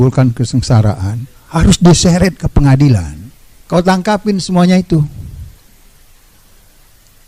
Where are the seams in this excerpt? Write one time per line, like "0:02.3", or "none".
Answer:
0:03.6